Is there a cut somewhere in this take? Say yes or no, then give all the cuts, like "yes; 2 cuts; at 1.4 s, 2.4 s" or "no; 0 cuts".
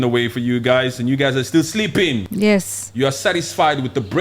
yes; 1 cut; at 2.3 s